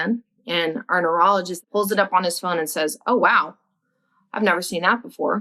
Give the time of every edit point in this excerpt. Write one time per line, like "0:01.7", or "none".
0:01.6